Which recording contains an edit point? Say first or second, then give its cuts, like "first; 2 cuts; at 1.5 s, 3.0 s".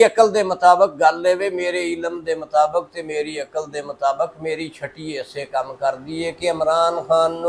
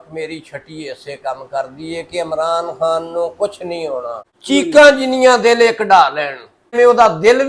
second; 2 cuts; at 4.3 s, 6.7 s